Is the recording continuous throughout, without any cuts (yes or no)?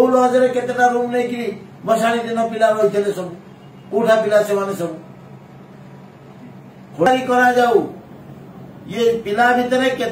no